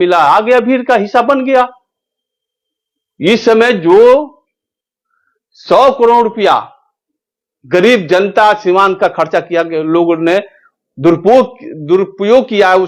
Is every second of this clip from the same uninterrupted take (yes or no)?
yes